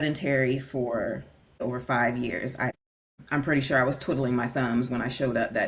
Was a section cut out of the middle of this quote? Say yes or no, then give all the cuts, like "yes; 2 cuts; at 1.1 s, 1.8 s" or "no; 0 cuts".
yes; 2 cuts; at 1.6 s, 2.7 s